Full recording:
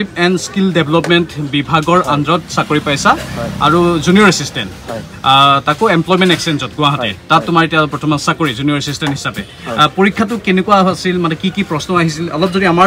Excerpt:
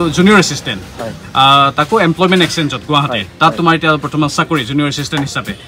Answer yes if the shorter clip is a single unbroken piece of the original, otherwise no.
yes